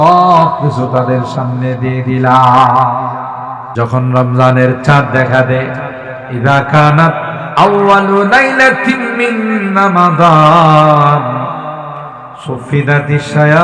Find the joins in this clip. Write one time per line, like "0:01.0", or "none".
0:03.6